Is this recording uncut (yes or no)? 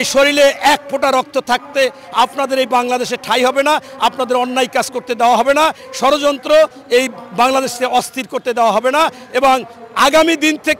yes